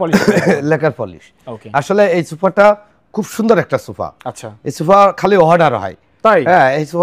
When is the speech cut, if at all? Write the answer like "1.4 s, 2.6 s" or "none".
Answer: none